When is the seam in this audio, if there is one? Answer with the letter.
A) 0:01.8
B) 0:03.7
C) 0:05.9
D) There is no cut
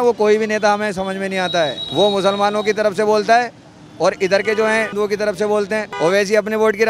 D